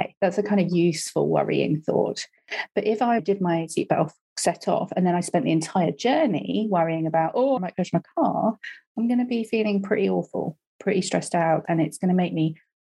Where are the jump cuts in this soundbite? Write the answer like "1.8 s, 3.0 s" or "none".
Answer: 3.2 s, 7.6 s, 11.6 s